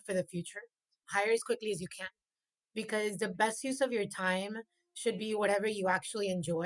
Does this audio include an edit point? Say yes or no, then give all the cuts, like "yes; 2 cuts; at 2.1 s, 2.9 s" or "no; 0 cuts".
yes; 1 cut; at 1.0 s